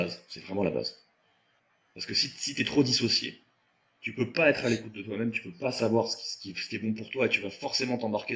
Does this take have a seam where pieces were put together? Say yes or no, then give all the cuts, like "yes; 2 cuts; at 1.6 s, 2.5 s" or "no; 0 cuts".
no; 0 cuts